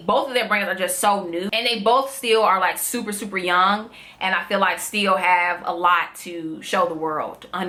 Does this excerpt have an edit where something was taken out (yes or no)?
no